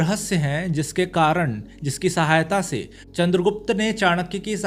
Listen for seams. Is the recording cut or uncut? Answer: uncut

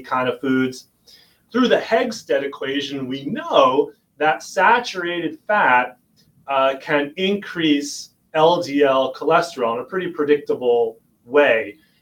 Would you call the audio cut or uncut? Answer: cut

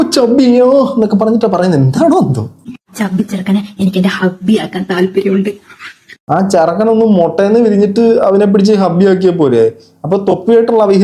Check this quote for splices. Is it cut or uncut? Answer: uncut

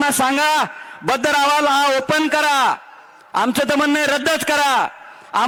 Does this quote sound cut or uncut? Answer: uncut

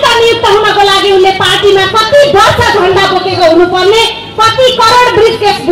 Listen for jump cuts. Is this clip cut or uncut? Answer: uncut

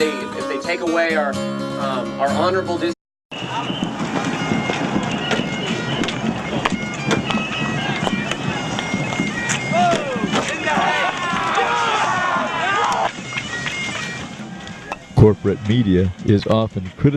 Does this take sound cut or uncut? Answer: uncut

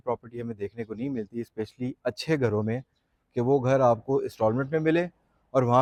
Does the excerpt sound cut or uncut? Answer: uncut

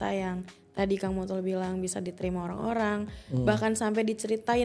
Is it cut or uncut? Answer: uncut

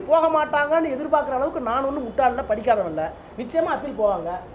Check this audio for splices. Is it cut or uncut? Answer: uncut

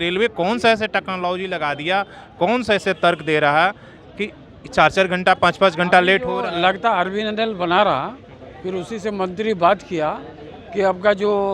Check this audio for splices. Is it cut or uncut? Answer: uncut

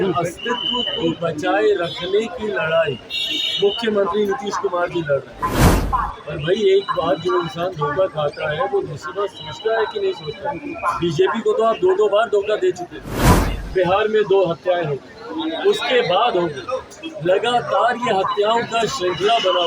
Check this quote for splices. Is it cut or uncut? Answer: cut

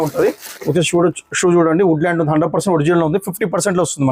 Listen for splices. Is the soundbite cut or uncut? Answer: uncut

